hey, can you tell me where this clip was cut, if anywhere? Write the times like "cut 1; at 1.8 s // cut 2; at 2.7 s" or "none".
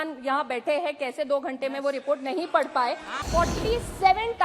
cut 1; at 3.2 s